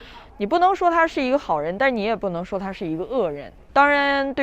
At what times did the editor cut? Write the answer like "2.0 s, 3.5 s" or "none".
3.5 s